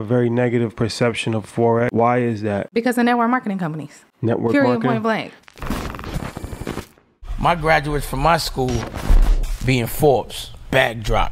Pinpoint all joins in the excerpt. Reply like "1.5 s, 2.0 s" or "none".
1.9 s, 2.7 s, 5.4 s

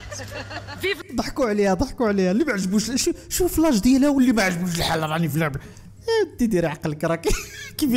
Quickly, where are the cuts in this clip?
1.0 s

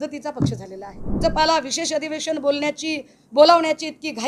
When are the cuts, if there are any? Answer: 1.1 s

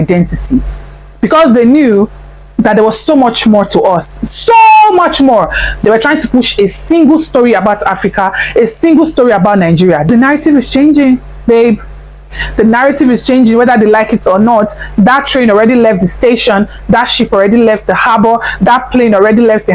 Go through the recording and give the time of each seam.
5.7 s, 10.1 s

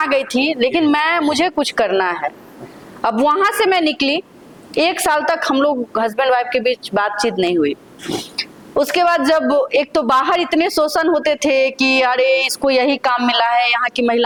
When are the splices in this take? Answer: none

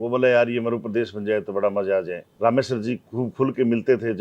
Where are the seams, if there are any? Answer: 2.2 s

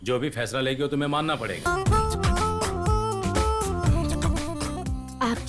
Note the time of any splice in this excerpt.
1.6 s

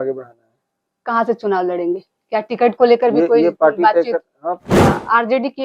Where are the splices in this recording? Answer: 4.7 s

